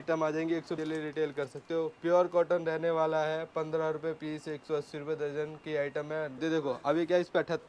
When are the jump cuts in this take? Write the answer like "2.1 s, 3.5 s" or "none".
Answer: 0.8 s, 6.4 s